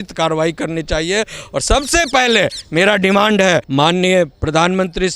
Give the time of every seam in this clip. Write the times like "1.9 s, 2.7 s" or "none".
3.7 s